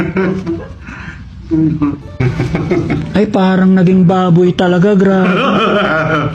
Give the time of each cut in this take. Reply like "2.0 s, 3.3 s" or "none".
2.2 s